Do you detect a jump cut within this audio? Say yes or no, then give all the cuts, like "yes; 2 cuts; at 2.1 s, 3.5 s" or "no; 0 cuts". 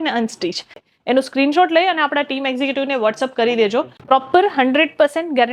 yes; 2 cuts; at 0.9 s, 3.9 s